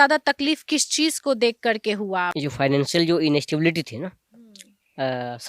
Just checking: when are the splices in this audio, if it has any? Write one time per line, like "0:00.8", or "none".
0:02.4